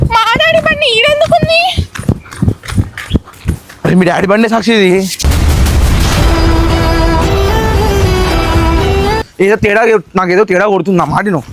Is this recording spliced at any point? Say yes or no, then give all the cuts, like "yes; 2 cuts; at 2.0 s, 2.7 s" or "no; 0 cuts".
yes; 1 cut; at 9.2 s